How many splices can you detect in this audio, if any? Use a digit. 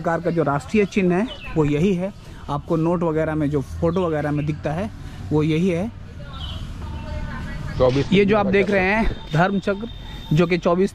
0